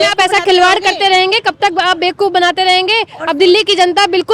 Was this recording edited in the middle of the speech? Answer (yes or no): no